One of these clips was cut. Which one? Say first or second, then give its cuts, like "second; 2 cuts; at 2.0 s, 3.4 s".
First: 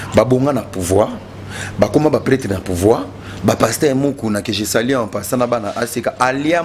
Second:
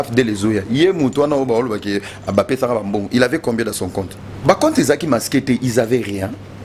second; 1 cut; at 4.2 s